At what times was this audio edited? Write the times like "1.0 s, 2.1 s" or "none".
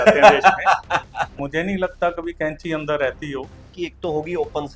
1.4 s, 3.7 s